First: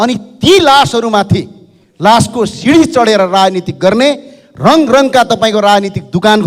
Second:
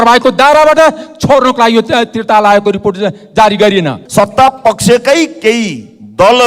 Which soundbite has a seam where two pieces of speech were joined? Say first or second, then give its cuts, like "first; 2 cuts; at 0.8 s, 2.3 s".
second; 1 cut; at 4.0 s